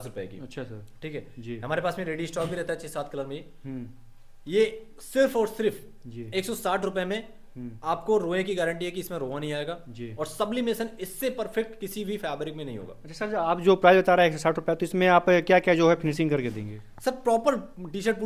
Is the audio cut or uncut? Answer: uncut